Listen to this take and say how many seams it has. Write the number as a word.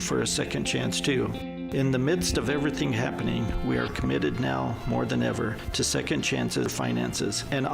one